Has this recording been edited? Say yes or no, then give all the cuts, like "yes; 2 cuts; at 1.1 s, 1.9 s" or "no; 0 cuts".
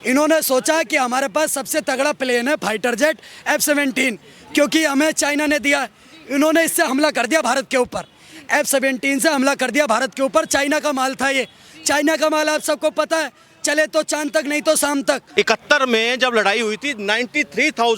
yes; 1 cut; at 15.2 s